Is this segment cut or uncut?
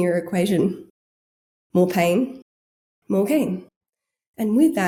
uncut